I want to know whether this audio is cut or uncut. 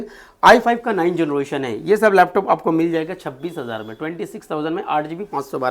uncut